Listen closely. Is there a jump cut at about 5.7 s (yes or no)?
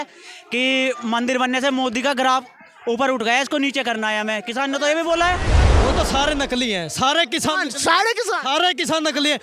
yes